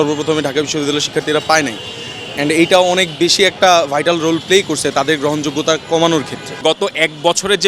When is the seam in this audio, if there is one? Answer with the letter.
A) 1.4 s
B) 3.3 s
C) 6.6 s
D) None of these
C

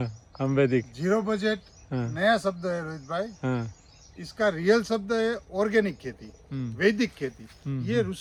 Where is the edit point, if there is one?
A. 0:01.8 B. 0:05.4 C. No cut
C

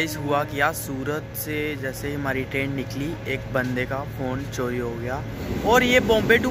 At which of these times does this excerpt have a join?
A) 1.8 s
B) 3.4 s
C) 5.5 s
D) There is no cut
C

